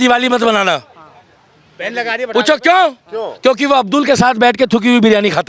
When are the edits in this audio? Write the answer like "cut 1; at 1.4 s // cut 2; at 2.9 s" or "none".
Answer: none

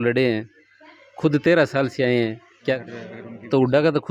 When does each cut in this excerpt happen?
cut 1; at 2.7 s

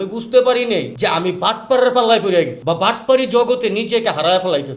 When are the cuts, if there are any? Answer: cut 1; at 0.9 s // cut 2; at 2.6 s

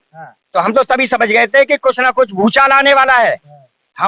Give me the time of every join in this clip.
none

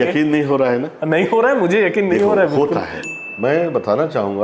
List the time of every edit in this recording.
cut 1; at 3.2 s

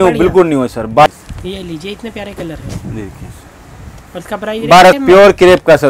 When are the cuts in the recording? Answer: cut 1; at 1.1 s // cut 2; at 5.0 s

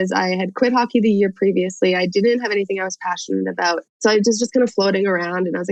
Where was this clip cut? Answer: none

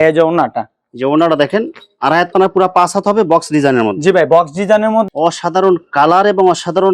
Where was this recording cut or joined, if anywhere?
cut 1; at 5.1 s

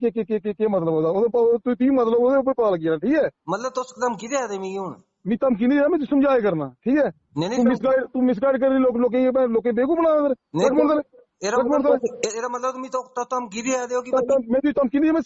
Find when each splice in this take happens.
none

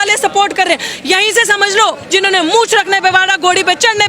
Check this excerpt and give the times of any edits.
cut 1; at 2.0 s

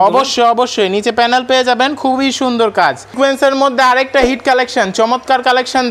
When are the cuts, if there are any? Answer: cut 1; at 3.0 s

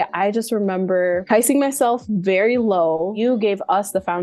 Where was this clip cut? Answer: cut 1; at 3.1 s

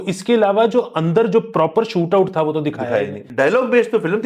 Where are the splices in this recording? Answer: cut 1; at 3.2 s

